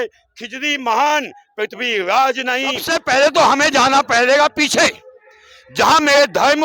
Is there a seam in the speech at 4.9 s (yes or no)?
no